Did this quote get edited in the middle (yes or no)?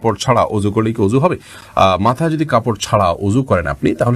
no